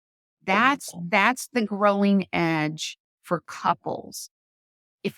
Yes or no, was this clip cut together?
no